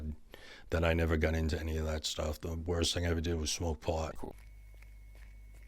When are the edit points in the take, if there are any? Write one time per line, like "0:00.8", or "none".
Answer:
0:04.3